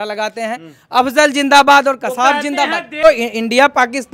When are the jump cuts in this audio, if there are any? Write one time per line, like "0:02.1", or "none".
0:03.0

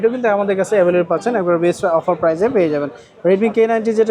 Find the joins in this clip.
none

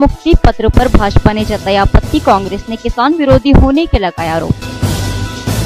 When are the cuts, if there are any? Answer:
none

